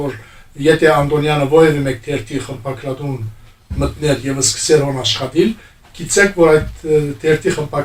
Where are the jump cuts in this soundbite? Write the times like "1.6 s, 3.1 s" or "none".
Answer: none